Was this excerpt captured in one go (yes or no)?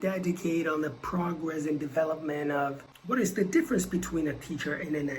no